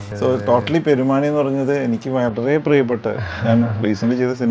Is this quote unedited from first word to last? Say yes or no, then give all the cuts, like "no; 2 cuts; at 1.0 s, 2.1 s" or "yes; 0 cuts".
yes; 0 cuts